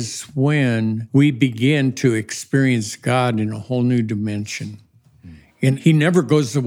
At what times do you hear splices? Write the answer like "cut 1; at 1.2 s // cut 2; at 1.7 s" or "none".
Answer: cut 1; at 1.0 s // cut 2; at 5.7 s